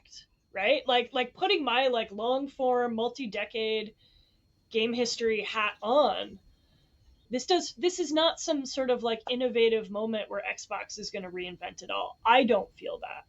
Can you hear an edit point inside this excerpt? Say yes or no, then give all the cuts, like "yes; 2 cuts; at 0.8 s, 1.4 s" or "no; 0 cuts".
yes; 1 cut; at 7.2 s